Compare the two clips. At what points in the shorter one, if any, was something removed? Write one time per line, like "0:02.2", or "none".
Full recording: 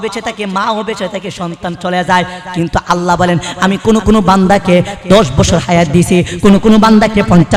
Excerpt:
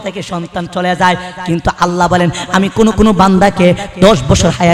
none